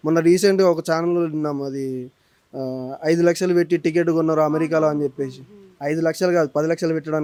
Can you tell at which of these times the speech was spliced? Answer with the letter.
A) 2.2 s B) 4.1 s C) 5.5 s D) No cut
D